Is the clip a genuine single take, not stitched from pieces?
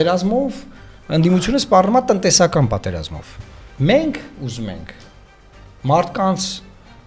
yes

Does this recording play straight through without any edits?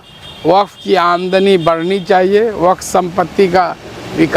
yes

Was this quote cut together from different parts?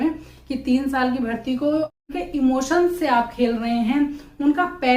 yes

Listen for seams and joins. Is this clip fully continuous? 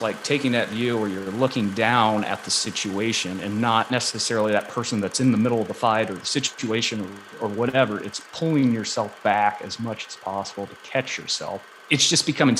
no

